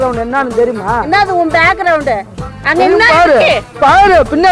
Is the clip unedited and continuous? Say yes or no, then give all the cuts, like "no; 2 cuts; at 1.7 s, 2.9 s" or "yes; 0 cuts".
yes; 0 cuts